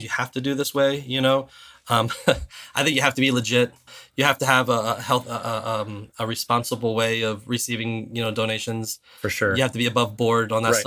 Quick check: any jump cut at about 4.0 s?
yes; 1 cut; at 4.0 s

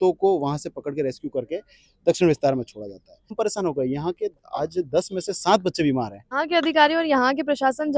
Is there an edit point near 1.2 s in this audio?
no; 2 cuts; at 3.3 s, 6.2 s

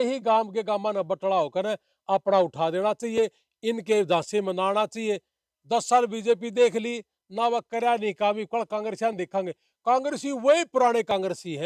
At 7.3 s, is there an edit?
no; 0 cuts

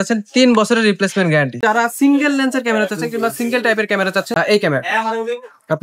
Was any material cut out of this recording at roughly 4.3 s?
yes; 2 cuts; at 1.6 s, 4.3 s

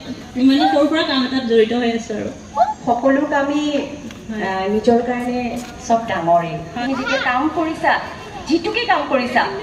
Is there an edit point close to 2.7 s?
yes; 2 cuts; at 2.7 s, 6.7 s

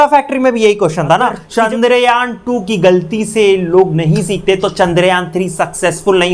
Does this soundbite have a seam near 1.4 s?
yes; 1 cut; at 1.4 s

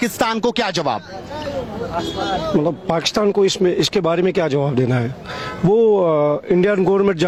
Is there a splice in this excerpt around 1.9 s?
no; 0 cuts

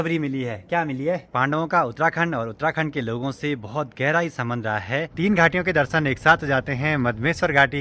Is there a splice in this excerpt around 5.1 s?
yes; 2 cuts; at 1.3 s, 5.1 s

